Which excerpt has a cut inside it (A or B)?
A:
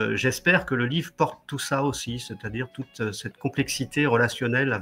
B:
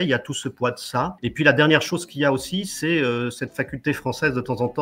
B